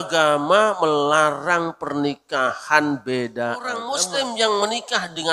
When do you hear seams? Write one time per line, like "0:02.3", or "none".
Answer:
0:03.8

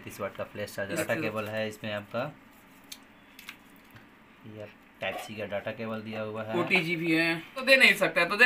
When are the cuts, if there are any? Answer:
0:01.0
0:07.7

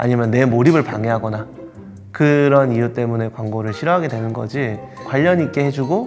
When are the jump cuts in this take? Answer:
0:05.0

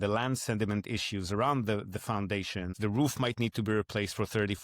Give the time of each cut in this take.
0:02.7

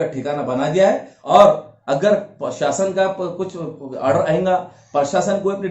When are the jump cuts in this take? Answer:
0:01.1

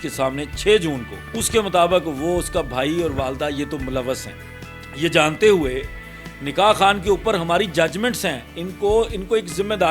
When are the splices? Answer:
0:04.3

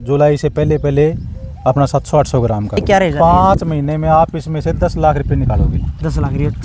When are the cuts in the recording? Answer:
0:02.8

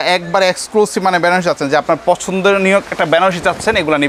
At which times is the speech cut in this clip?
none

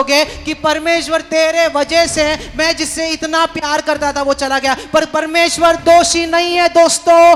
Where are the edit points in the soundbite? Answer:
none

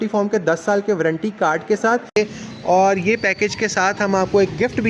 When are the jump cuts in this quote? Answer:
0:02.2

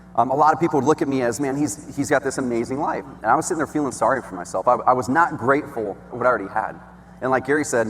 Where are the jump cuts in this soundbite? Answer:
0:03.1
0:06.1

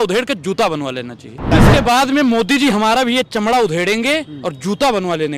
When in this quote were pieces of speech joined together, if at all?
0:01.5

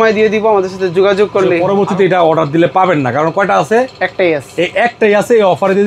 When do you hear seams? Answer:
0:01.6

